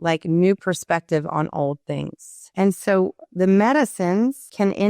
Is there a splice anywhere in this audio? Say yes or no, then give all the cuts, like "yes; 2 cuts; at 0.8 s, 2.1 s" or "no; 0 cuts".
yes; 1 cut; at 2.4 s